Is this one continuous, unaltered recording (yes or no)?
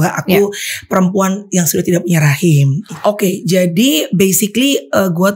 no